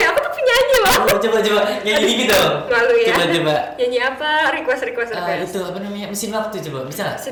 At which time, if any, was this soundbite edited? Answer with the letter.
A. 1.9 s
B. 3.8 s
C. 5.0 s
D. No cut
D